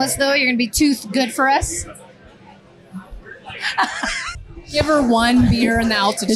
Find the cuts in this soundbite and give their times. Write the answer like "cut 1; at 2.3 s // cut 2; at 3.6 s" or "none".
cut 1; at 4.3 s

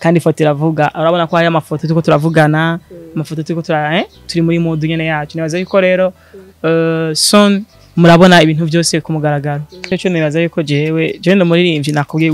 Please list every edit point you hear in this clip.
cut 1; at 9.9 s

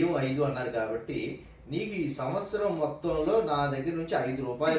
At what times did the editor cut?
none

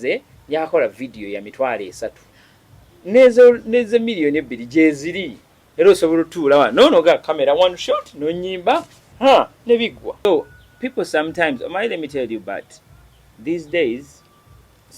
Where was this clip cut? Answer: cut 1; at 10.2 s

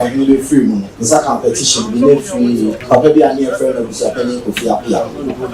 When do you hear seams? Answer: cut 1; at 0.9 s // cut 2; at 2.8 s

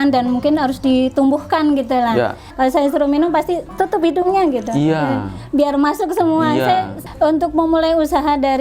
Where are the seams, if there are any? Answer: cut 1; at 2.4 s // cut 2; at 7.0 s

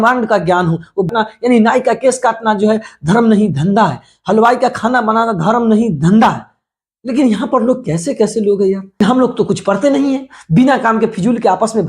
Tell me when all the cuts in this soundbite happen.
cut 1; at 1.1 s // cut 2; at 9.0 s

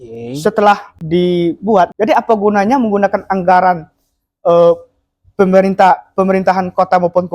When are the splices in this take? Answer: cut 1; at 0.9 s // cut 2; at 1.9 s

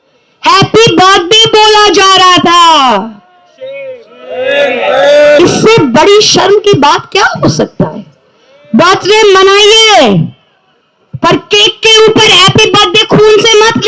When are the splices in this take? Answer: none

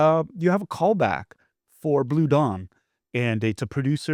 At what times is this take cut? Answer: none

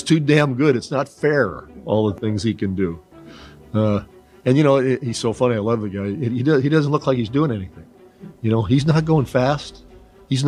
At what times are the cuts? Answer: none

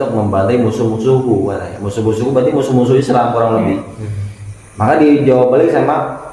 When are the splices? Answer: none

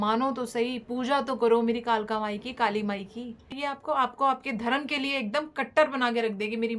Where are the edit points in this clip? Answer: cut 1; at 3.5 s

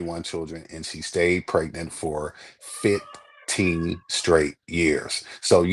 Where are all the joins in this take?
none

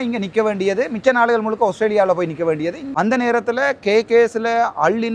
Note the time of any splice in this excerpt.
cut 1; at 2.8 s

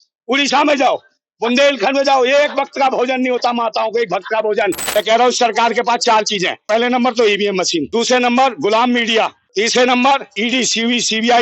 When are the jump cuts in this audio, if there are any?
cut 1; at 4.8 s // cut 2; at 6.7 s // cut 3; at 7.9 s // cut 4; at 9.4 s // cut 5; at 10.3 s

